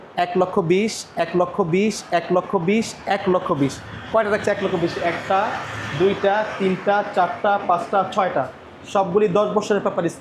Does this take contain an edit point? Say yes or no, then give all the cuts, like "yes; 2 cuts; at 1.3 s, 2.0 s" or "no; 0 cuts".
no; 0 cuts